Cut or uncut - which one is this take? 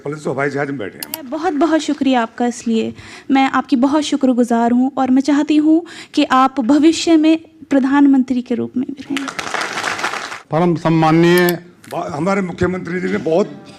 cut